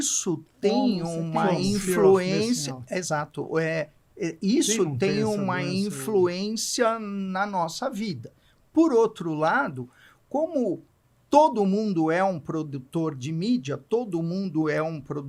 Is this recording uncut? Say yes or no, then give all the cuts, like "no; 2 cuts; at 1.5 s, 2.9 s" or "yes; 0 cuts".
yes; 0 cuts